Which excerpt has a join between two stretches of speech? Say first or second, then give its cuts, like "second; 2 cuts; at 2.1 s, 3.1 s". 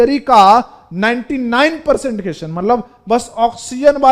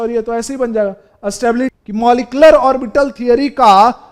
second; 1 cut; at 1.7 s